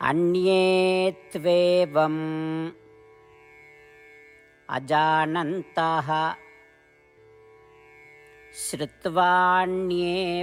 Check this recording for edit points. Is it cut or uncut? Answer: uncut